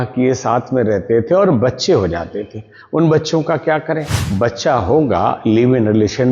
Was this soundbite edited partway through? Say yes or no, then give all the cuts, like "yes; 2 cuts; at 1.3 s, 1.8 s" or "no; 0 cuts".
yes; 1 cut; at 4.2 s